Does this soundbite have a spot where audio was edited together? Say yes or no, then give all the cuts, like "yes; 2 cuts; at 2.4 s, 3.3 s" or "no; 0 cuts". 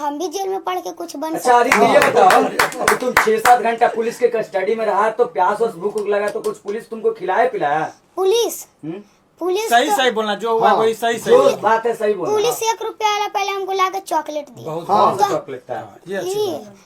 no; 0 cuts